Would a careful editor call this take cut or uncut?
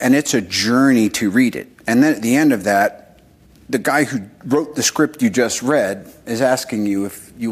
uncut